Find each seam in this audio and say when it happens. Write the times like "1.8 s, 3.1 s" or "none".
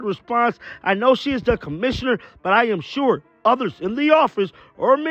none

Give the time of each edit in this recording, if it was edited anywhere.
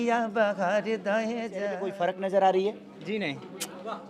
1.9 s

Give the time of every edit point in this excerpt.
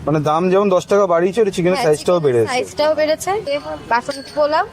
3.4 s

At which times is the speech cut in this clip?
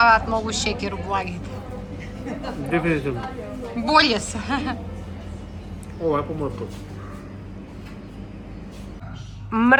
none

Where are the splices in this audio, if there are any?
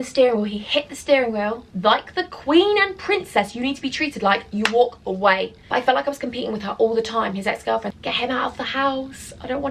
1.6 s, 5.5 s, 8.0 s

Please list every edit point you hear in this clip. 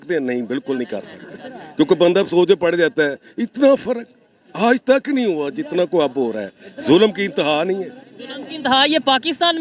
none

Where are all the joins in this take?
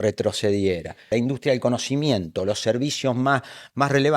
1.0 s

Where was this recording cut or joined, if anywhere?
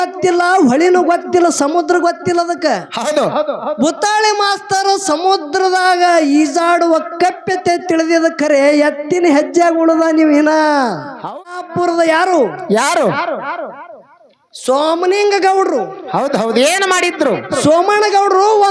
11.4 s

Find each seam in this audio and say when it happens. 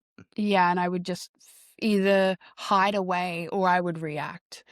none

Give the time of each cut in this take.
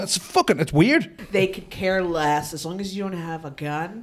1.2 s

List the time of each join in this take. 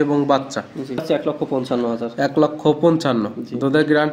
1.0 s

